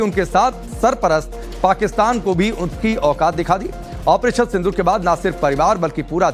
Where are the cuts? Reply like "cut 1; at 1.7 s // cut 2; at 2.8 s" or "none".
cut 1; at 4.6 s

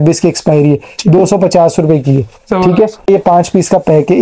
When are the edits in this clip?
cut 1; at 3.1 s

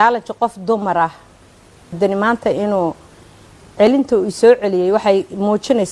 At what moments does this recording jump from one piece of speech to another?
cut 1; at 1.9 s

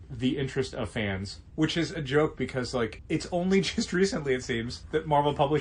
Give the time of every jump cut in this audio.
cut 1; at 1.4 s // cut 2; at 3.0 s // cut 3; at 4.7 s

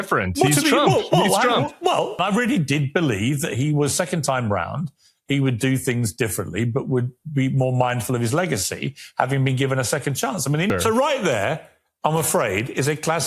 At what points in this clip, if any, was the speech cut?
cut 1; at 2.2 s // cut 2; at 10.7 s

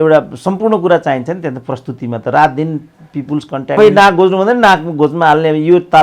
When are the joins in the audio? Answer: cut 1; at 3.8 s

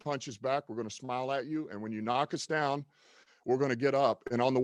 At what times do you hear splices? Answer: none

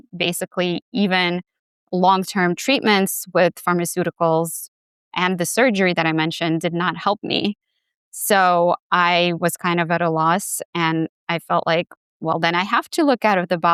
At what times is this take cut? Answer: none

